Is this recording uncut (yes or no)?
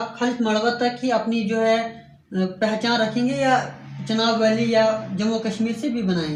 yes